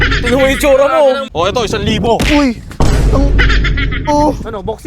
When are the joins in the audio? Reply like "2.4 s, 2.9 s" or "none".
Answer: 1.2 s